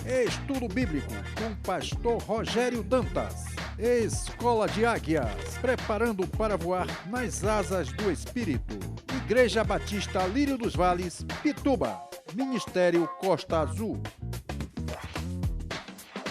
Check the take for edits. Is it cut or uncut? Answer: uncut